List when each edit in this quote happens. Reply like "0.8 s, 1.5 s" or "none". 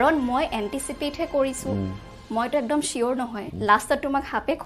3.4 s

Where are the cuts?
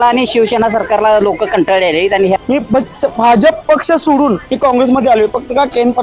2.4 s, 4.5 s

